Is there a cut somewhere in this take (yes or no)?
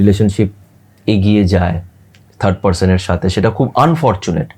no